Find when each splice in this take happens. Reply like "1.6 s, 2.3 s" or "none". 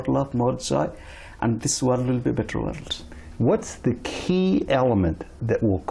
none